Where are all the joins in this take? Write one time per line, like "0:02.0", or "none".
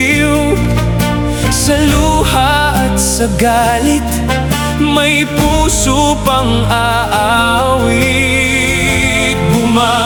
none